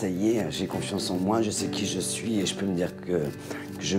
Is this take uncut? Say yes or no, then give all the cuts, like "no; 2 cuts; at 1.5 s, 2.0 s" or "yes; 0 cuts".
yes; 0 cuts